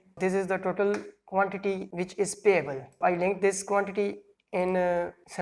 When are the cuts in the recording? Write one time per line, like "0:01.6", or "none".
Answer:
none

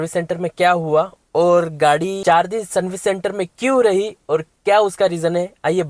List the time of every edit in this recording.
0:02.2

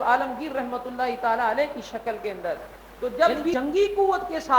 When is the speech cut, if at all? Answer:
0:03.2

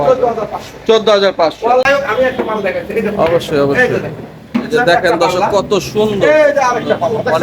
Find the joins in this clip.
0:01.8

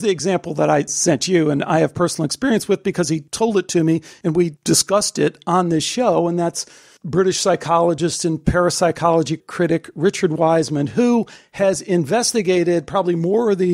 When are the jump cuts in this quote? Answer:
0:00.9
0:03.3
0:04.4

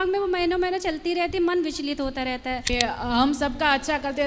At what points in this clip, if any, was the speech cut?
0:02.7

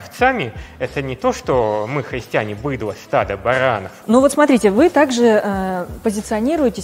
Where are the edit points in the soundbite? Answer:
0:03.9

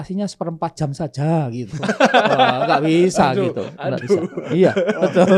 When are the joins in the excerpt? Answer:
none

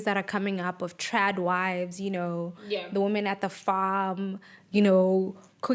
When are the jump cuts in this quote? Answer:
none

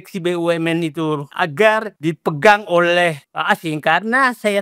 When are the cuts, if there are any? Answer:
0:01.3
0:01.9
0:03.2

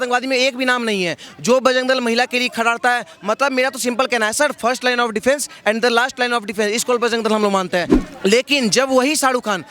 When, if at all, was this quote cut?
0:08.0

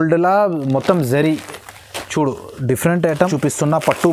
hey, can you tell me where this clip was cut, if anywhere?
0:03.2

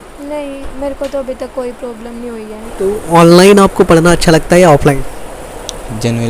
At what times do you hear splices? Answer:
0:02.6

